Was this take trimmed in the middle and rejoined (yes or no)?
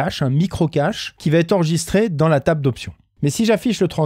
yes